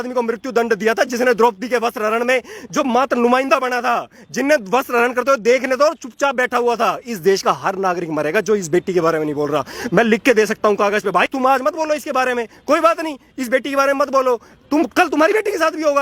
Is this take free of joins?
yes; 0 cuts

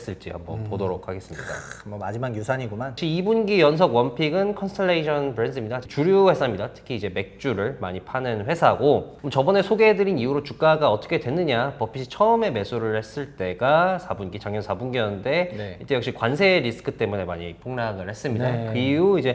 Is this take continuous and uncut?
no; 3 cuts; at 3.0 s, 5.8 s, 9.2 s

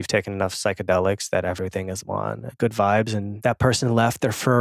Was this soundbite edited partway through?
yes; 2 cuts; at 2.5 s, 3.4 s

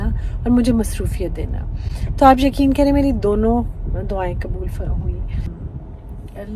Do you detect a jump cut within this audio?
yes; 1 cut; at 5.5 s

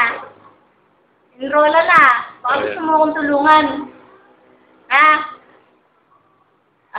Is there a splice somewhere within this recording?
no; 0 cuts

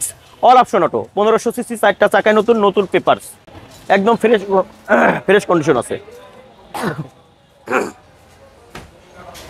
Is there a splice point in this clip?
no; 0 cuts

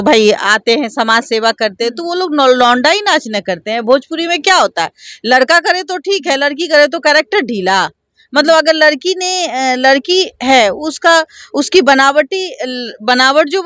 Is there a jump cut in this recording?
no; 0 cuts

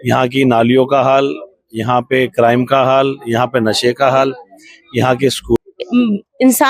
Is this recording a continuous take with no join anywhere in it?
no; 1 cut; at 5.6 s

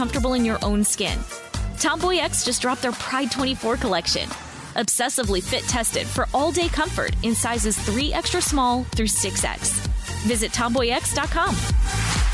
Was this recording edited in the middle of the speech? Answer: no; 0 cuts

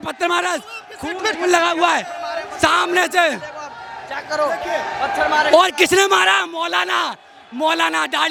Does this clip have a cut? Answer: no; 0 cuts

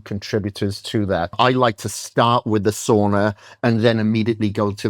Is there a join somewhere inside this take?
yes; 1 cut; at 1.3 s

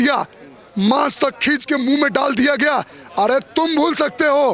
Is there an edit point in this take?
no; 0 cuts

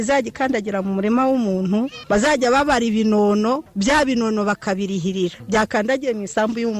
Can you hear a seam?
yes; 3 cuts; at 2.0 s, 3.7 s, 5.4 s

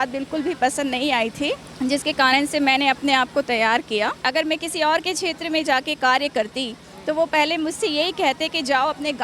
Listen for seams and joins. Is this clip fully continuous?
no; 2 cuts; at 1.7 s, 4.2 s

